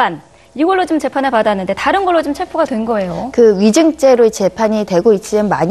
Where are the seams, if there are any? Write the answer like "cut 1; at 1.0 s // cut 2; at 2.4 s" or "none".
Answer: none